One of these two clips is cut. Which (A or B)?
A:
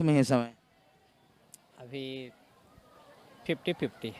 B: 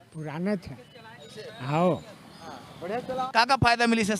B